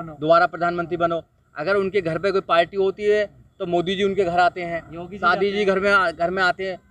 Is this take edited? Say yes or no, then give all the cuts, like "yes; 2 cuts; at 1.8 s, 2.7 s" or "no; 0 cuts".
no; 0 cuts